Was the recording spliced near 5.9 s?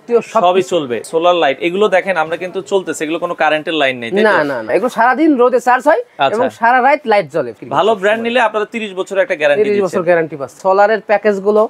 no; 4 cuts; at 1.0 s, 4.7 s, 7.5 s, 10.5 s

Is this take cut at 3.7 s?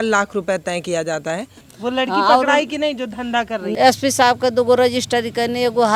yes; 2 cuts; at 1.6 s, 3.7 s

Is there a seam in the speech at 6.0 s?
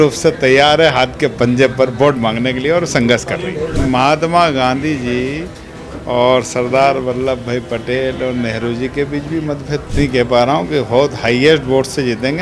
no; 2 cuts; at 3.7 s, 10.0 s

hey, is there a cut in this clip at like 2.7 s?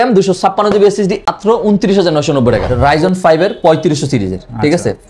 yes; 2 cuts; at 1.3 s, 2.7 s

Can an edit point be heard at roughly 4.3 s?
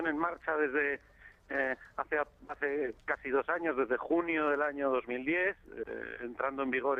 yes; 1 cut; at 4.3 s

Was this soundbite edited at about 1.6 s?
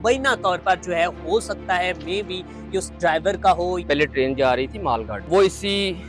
no; 2 cuts; at 3.8 s, 5.3 s

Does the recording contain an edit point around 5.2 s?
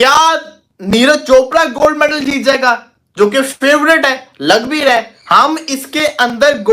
yes; 1 cut; at 5.2 s

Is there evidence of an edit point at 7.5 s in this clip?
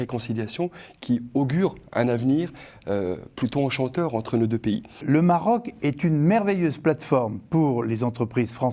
no; 1 cut; at 5.0 s

